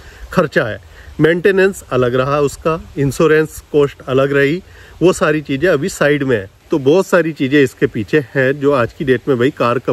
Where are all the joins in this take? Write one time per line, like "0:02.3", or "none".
0:06.5